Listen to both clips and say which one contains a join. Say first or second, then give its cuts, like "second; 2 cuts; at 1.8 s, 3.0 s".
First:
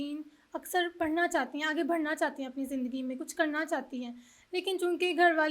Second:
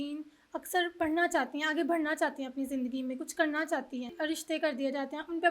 second; 1 cut; at 4.1 s